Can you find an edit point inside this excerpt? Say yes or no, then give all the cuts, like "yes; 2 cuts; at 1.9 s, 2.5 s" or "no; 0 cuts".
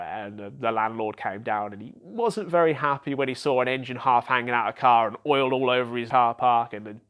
yes; 1 cut; at 6.0 s